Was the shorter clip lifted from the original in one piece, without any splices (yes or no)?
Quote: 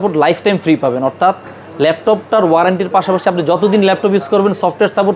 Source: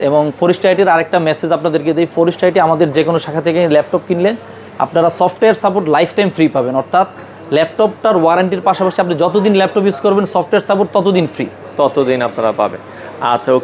yes